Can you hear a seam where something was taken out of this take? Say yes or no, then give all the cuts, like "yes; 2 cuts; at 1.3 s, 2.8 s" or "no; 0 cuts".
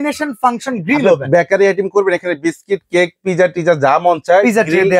no; 0 cuts